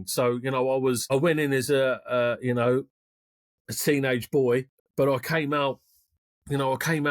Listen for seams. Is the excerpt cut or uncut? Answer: cut